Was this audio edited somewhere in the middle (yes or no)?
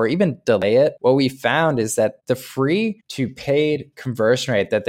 yes